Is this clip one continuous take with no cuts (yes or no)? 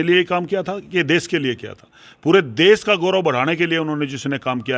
yes